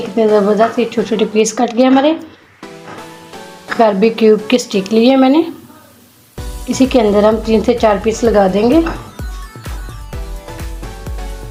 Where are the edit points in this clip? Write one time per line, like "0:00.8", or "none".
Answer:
none